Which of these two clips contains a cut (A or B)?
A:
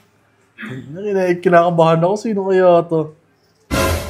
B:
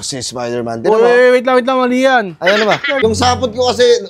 B